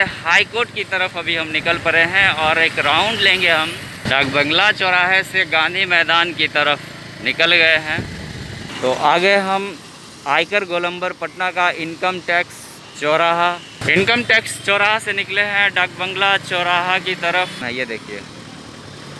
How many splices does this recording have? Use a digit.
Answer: 4